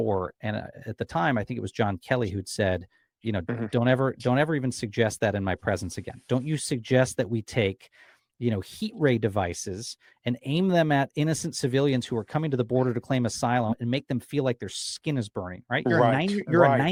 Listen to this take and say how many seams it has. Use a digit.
0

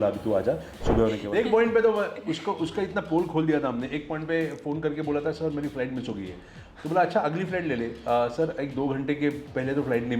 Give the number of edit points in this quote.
1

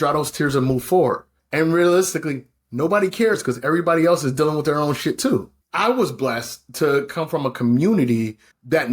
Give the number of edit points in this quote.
1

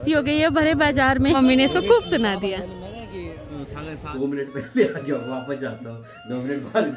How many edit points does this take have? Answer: 2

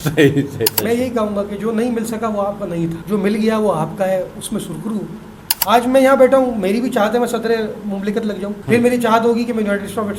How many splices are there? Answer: 4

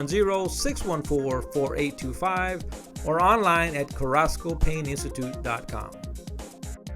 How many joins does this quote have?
1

